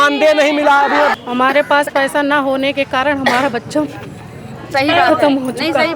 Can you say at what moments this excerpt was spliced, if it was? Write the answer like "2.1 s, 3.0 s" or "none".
1.1 s